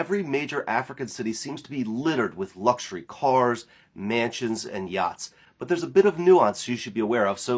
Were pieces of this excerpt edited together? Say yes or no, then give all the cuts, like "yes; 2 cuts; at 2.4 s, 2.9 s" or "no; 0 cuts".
no; 0 cuts